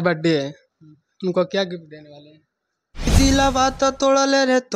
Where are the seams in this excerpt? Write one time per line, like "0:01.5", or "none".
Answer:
0:03.1